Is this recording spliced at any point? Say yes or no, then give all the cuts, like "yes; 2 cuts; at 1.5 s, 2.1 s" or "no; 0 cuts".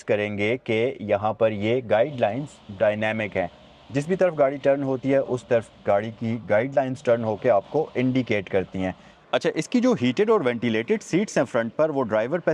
yes; 1 cut; at 9.1 s